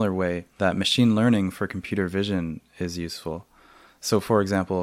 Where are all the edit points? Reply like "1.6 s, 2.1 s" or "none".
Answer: none